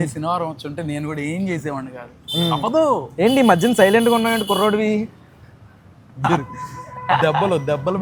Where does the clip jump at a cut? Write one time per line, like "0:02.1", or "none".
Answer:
none